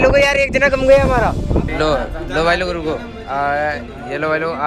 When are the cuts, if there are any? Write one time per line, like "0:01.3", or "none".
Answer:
0:01.7